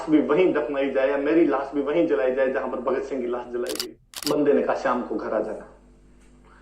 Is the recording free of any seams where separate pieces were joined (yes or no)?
no